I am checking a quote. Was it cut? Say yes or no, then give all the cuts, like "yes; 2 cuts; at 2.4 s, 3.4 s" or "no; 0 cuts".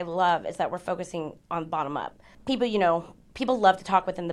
yes; 1 cut; at 2.3 s